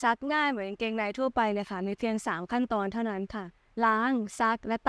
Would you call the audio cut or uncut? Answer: cut